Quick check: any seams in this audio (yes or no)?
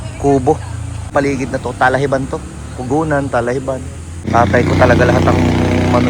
yes